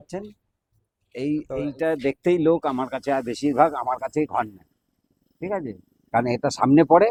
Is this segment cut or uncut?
uncut